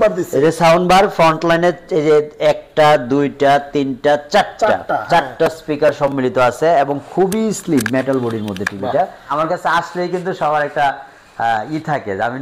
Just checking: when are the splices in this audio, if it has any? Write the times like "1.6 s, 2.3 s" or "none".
9.2 s